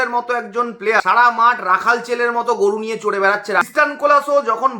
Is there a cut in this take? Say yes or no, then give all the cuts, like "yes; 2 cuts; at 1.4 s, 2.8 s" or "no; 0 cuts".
yes; 2 cuts; at 1.0 s, 3.6 s